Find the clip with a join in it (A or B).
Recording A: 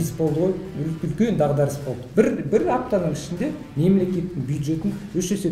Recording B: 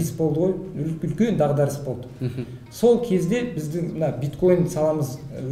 A